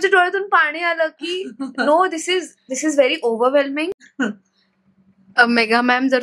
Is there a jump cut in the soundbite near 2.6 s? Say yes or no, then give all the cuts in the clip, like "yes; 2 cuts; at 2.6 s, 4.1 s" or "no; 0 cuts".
no; 1 cut; at 4.0 s